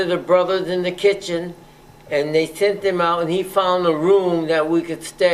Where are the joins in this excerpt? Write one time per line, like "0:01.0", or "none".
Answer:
none